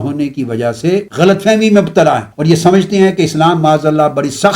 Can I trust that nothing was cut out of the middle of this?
no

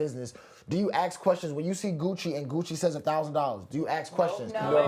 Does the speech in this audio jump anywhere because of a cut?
no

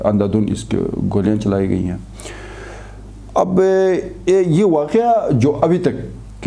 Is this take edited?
no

